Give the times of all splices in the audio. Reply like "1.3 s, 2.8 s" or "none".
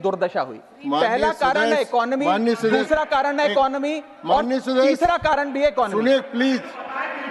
none